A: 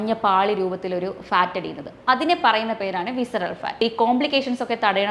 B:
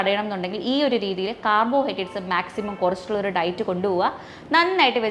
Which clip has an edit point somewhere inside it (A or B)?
A